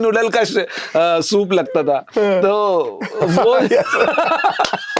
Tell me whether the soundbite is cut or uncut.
uncut